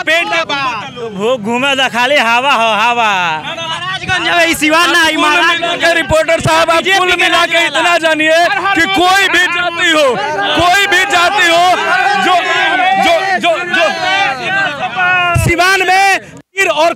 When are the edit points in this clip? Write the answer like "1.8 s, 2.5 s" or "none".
none